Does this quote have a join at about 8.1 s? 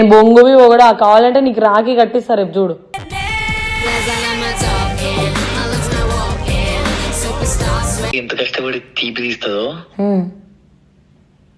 yes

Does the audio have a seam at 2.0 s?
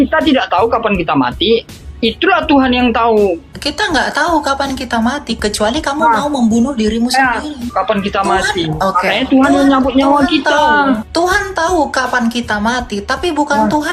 no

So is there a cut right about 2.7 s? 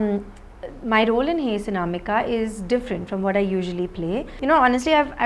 no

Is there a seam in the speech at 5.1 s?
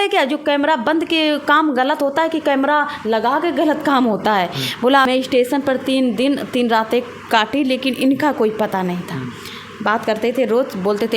yes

